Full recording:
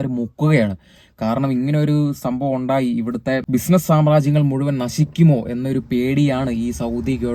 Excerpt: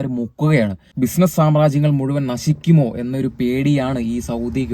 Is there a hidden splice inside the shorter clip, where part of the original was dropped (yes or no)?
yes